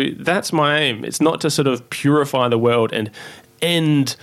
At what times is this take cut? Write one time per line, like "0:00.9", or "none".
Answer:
none